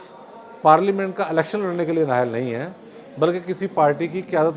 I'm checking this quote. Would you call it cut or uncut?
uncut